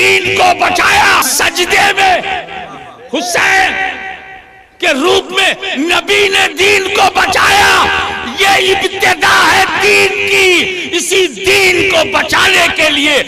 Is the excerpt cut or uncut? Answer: cut